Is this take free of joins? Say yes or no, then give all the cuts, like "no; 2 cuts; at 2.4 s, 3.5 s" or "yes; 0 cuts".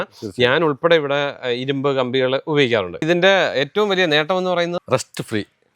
no; 2 cuts; at 3.0 s, 4.8 s